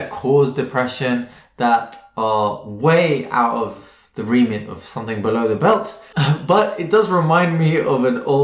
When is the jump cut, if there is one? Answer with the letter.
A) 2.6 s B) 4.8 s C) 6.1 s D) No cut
C